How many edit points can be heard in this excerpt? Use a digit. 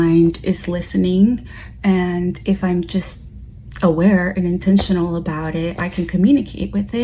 0